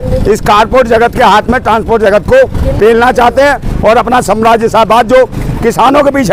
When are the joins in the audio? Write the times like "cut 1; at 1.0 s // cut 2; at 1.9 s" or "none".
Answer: none